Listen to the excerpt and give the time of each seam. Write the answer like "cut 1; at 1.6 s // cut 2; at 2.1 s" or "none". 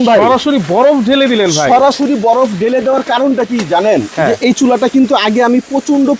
none